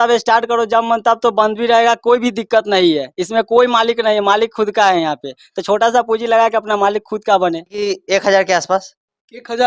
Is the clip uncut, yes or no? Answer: no